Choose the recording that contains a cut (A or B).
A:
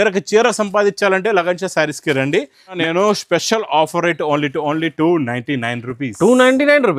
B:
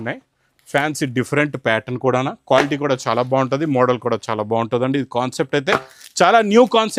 A